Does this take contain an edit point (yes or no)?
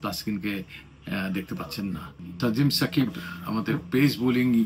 yes